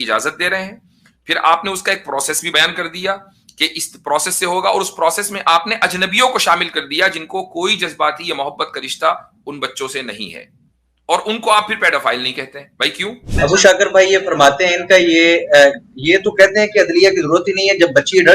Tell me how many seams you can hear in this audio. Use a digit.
2